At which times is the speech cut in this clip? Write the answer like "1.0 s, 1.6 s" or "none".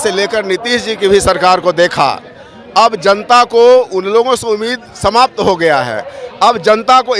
none